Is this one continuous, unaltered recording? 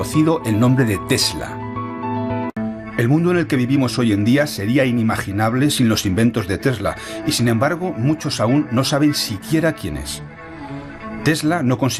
no; 1 cut; at 7.0 s

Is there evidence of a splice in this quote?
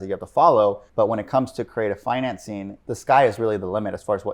yes; 2 cuts; at 0.8 s, 2.7 s

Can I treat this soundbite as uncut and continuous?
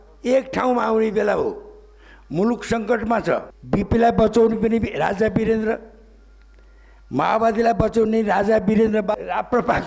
no; 2 cuts; at 3.5 s, 9.2 s

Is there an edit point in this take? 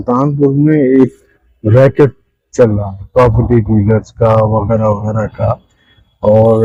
no; 0 cuts

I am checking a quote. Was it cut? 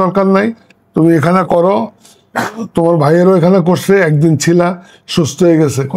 no; 0 cuts

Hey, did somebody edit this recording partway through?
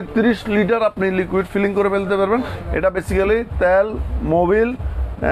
no; 0 cuts

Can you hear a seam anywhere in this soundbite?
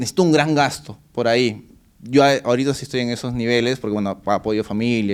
no; 0 cuts

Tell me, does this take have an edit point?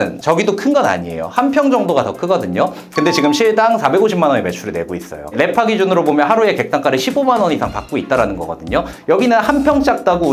no; 0 cuts

